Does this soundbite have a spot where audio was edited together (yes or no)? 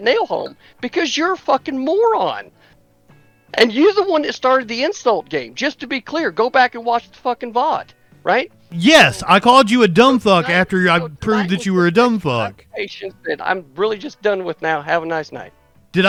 no